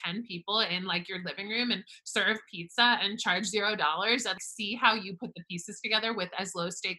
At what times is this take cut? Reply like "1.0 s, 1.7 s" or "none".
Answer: 4.5 s